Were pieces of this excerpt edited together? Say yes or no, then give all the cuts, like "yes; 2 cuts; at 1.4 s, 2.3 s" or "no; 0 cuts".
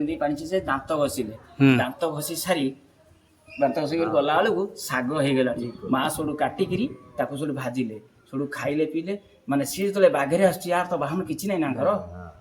no; 0 cuts